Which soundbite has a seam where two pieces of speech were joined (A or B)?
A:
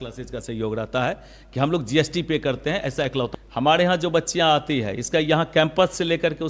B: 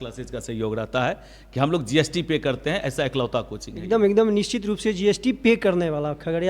A